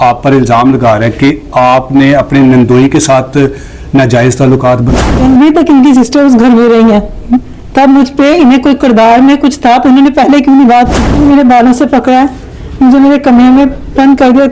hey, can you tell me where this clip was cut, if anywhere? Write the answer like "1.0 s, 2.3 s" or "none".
5.0 s, 11.2 s